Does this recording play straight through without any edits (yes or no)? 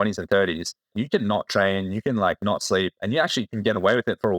no